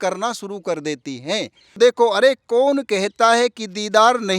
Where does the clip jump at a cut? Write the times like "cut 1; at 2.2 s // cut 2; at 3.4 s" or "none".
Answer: cut 1; at 1.8 s